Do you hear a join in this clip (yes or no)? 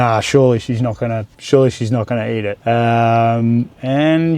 yes